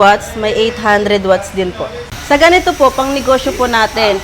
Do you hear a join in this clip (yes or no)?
yes